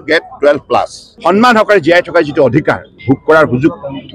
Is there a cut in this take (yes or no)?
yes